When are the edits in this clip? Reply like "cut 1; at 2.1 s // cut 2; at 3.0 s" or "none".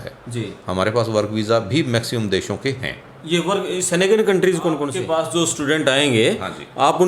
cut 1; at 4.9 s